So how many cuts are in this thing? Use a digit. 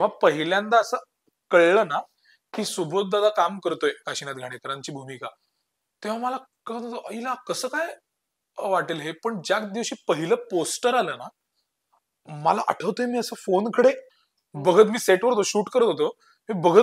0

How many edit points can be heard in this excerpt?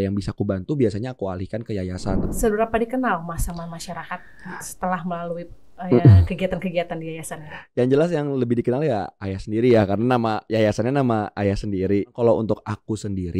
2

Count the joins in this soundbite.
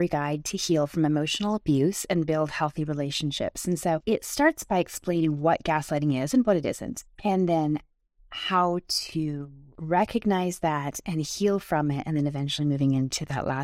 0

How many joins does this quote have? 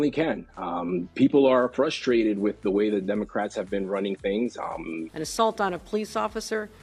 1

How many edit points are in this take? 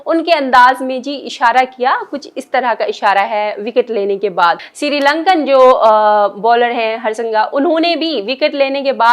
1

